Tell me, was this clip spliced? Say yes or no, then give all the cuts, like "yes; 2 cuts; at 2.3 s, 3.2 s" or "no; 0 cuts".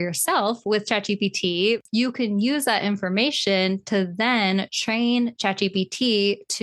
yes; 1 cut; at 1.8 s